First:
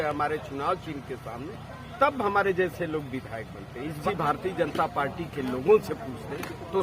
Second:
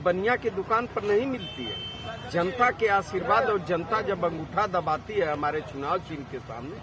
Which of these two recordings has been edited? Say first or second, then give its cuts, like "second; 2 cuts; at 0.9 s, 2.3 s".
first; 1 cut; at 4.0 s